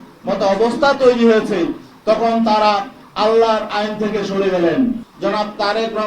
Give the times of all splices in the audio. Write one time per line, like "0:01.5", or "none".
0:05.1